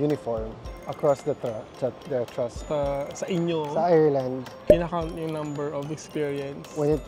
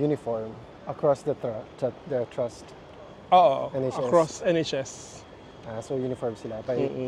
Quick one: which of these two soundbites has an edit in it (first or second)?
first